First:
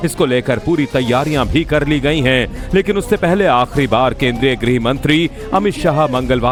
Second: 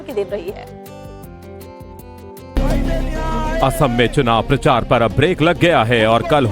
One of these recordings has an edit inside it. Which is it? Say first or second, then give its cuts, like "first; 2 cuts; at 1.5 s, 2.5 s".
second; 1 cut; at 2.4 s